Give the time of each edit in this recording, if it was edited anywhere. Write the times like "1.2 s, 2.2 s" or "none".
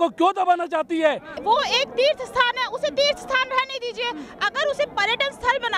1.3 s